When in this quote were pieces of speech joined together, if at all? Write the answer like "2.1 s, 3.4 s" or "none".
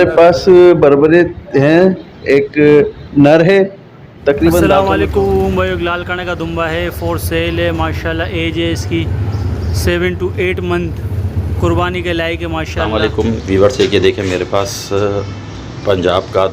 4.8 s, 12.9 s

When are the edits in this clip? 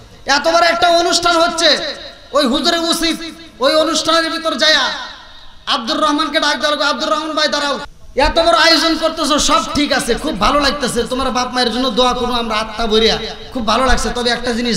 8.0 s

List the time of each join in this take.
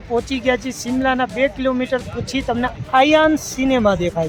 none

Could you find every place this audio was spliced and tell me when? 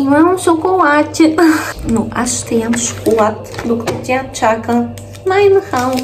1.6 s

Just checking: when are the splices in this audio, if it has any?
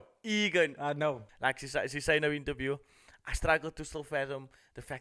1.3 s

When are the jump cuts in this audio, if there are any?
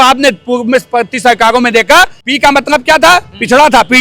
2.2 s

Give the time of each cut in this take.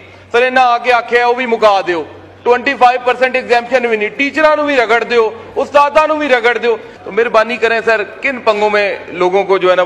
6.9 s

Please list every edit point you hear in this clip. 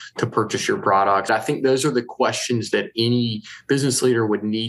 1.3 s

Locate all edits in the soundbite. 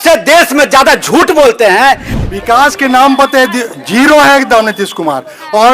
2.1 s

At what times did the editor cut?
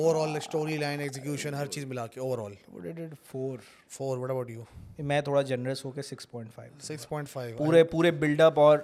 none

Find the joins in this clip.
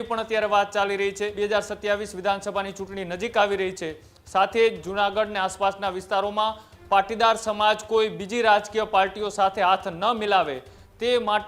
1.3 s

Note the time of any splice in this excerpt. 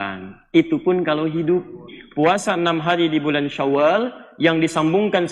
2.0 s

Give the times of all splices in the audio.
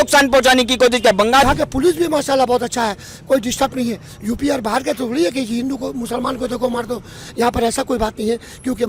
1.4 s

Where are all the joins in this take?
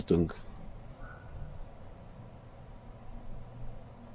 none

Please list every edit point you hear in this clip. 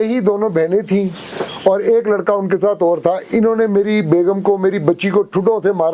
none

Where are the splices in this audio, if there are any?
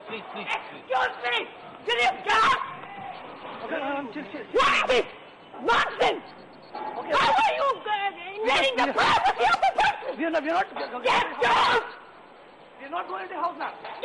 none

